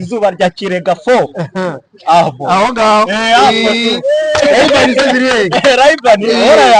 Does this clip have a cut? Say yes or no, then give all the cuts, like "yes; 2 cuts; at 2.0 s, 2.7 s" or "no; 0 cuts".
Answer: no; 0 cuts